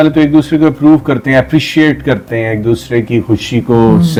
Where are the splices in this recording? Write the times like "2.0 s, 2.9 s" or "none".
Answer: none

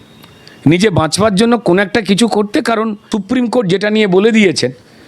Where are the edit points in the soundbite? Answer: 3.0 s

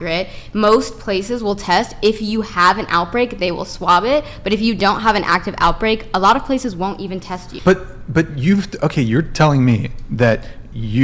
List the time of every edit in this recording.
none

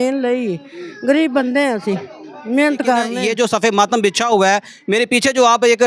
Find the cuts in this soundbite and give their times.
3.2 s

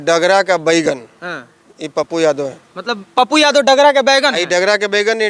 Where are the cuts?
none

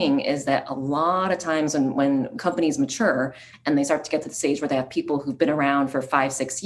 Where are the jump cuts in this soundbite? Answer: 2.3 s

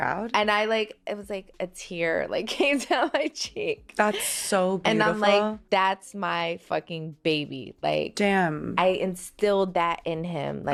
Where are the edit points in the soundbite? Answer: none

